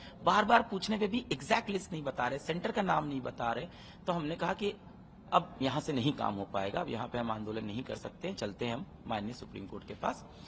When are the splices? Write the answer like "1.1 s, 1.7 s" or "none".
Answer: none